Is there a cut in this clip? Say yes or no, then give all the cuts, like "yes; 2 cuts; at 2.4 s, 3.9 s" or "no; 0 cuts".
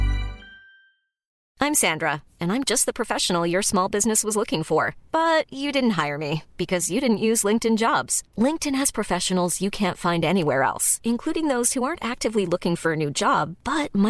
yes; 1 cut; at 1.4 s